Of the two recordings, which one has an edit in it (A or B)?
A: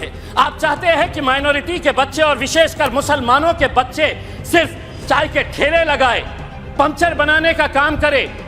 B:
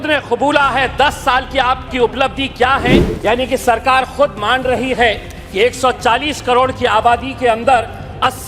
B